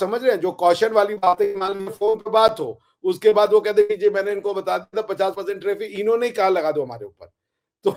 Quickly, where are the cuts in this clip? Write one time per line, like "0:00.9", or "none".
none